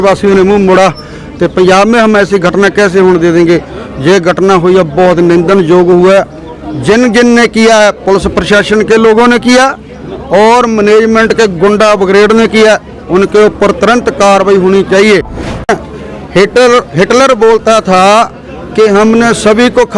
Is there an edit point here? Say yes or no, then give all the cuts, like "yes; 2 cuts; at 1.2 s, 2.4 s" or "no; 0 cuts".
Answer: yes; 1 cut; at 15.7 s